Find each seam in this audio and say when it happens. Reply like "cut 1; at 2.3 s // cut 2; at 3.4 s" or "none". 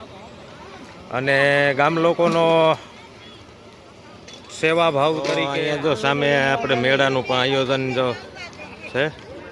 cut 1; at 5.5 s